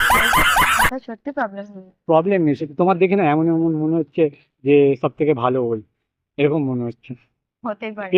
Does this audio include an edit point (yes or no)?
no